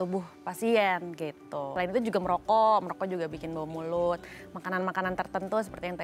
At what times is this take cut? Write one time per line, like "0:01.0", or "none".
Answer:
0:01.7